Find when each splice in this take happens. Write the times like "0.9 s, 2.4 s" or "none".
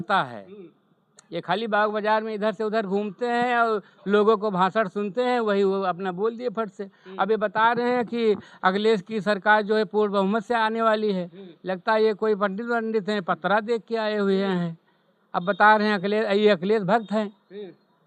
none